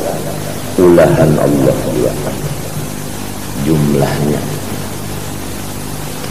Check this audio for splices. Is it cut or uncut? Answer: uncut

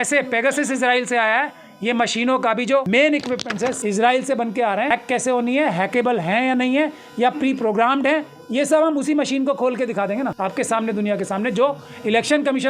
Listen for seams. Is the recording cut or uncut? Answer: cut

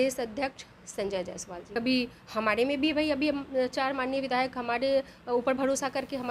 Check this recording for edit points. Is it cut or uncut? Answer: cut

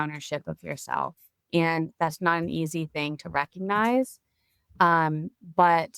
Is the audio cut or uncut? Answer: uncut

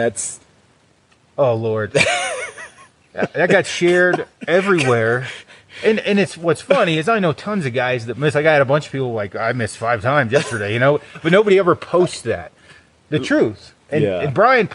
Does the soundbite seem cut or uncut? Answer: uncut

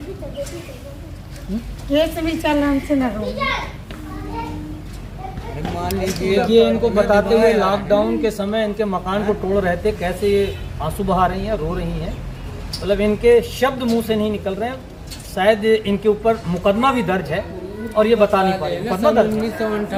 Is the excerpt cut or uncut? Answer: uncut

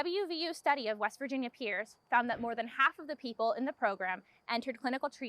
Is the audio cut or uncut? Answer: uncut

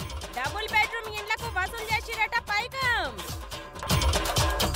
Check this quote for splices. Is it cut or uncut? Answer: cut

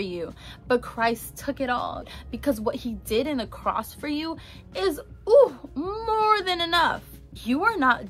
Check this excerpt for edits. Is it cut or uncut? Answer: cut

